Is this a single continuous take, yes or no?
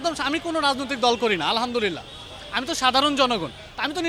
yes